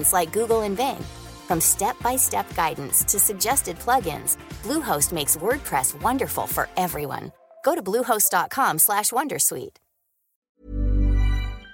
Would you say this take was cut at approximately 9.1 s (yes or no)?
no